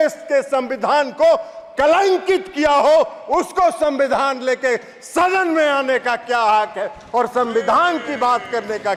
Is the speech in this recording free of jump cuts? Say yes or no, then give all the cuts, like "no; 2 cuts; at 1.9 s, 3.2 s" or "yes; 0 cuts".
yes; 0 cuts